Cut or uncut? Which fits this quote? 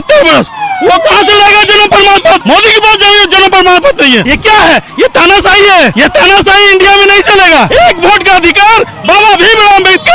cut